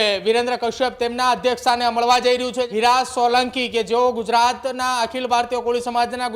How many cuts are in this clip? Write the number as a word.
one